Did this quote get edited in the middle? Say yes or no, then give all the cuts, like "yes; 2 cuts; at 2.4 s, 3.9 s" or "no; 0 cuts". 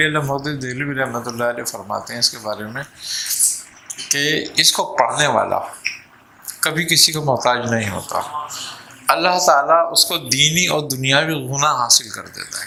no; 0 cuts